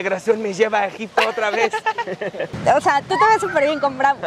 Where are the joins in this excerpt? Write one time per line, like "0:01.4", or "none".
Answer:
0:02.6